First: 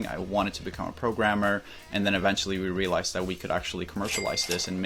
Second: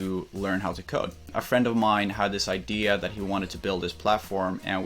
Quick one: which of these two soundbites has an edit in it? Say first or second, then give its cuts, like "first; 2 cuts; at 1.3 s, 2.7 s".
second; 1 cut; at 1.2 s